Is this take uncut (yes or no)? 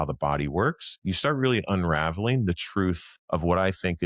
no